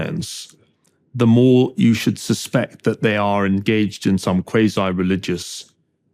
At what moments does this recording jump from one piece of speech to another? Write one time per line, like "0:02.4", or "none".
none